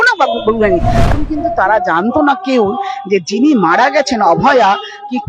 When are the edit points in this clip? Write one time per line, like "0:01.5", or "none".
0:01.1